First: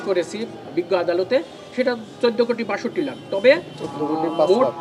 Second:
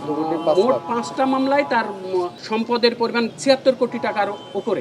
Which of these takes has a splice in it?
second; 2 cuts; at 2.4 s, 3.3 s

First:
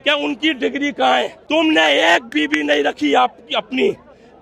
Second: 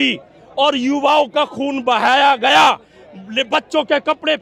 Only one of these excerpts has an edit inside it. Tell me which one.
first; 1 cut; at 1.4 s

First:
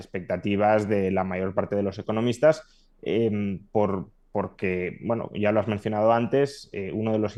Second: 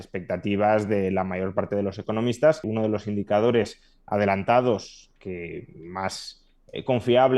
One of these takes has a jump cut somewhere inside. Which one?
second; 1 cut; at 2.6 s

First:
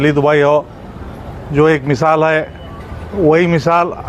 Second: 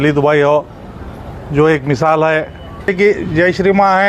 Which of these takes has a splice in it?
second; 1 cut; at 2.9 s

